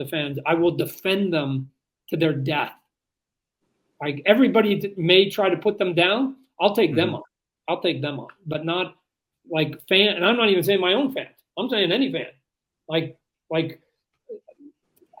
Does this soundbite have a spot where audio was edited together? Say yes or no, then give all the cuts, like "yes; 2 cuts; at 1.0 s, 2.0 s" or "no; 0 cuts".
no; 0 cuts